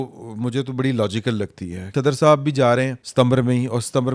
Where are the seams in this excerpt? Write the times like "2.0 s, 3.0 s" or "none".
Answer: 1.9 s